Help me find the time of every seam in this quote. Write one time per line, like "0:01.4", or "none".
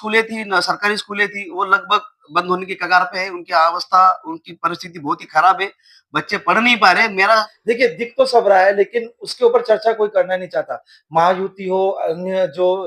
0:07.5